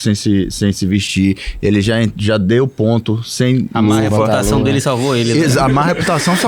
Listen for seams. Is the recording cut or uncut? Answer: uncut